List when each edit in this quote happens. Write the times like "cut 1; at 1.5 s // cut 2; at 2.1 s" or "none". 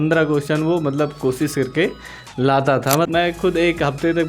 cut 1; at 3.1 s